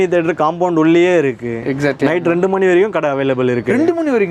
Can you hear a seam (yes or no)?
no